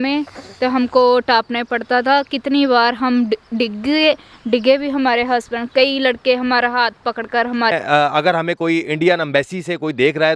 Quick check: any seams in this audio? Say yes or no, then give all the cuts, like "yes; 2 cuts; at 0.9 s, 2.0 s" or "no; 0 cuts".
yes; 1 cut; at 7.7 s